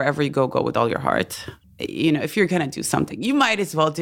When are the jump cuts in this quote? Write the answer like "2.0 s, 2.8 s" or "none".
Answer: 1.6 s